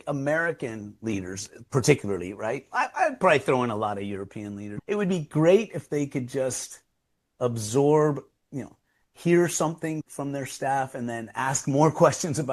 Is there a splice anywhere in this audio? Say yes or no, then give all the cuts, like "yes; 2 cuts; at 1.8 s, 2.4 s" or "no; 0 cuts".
yes; 2 cuts; at 4.6 s, 10.0 s